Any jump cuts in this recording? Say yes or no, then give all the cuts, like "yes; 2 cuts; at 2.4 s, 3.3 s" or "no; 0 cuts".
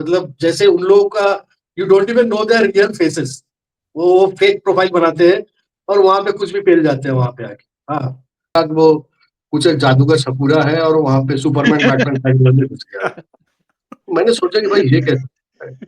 yes; 1 cut; at 8.5 s